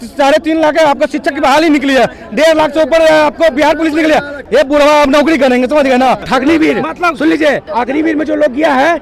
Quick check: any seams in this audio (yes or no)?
yes